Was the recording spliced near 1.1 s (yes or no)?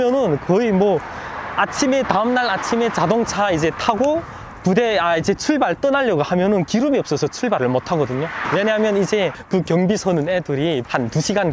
no